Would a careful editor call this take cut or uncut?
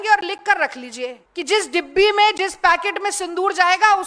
cut